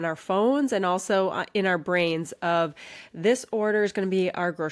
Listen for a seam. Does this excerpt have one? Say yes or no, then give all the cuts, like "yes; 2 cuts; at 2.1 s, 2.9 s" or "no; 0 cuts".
no; 0 cuts